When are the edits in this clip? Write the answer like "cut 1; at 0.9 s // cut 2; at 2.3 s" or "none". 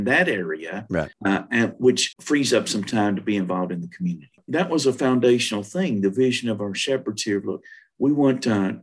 cut 1; at 1.1 s // cut 2; at 2.1 s // cut 3; at 4.4 s